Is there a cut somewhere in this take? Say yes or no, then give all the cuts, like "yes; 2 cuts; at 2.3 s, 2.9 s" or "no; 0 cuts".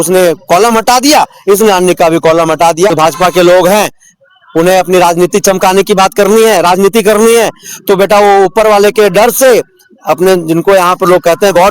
yes; 1 cut; at 2.9 s